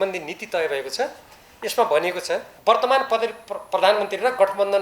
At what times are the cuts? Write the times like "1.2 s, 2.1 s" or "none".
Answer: 2.5 s